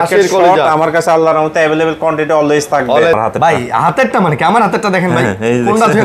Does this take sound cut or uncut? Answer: cut